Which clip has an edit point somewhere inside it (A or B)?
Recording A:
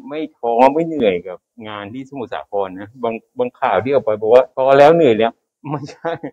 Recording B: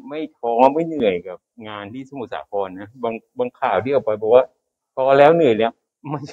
A